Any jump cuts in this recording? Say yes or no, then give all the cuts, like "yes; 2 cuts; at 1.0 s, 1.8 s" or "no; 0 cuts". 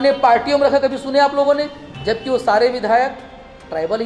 no; 0 cuts